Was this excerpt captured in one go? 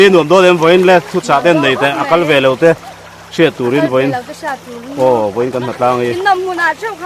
yes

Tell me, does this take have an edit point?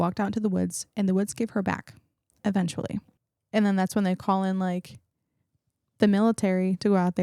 yes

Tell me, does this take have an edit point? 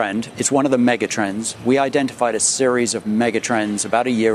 no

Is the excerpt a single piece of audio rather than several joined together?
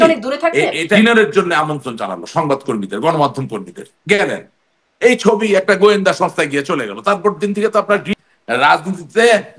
no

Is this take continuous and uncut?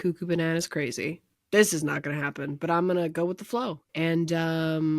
no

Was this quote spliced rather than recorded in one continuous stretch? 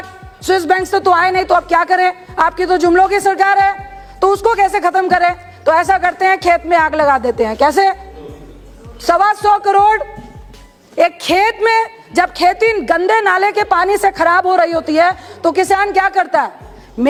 no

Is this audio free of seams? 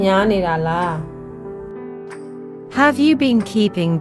no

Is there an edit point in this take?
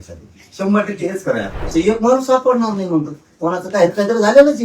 yes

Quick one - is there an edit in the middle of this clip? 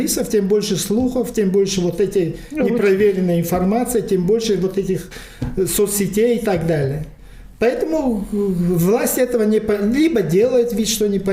no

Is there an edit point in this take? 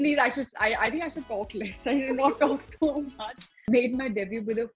yes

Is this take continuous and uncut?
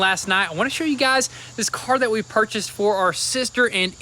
yes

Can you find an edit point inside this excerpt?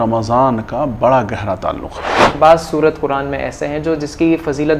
yes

